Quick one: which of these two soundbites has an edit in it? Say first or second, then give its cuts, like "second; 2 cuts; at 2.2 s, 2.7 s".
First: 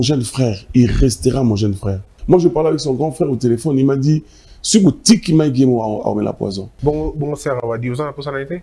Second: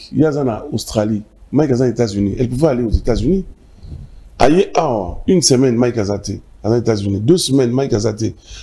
first; 2 cuts; at 2.1 s, 6.7 s